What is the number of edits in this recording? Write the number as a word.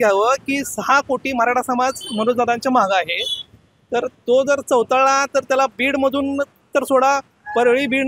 zero